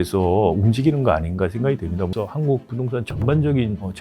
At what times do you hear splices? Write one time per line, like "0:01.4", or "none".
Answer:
0:02.1